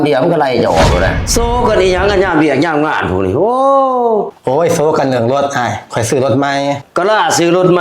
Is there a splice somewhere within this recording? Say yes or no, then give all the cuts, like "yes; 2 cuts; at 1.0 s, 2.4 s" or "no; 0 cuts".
yes; 1 cut; at 1.2 s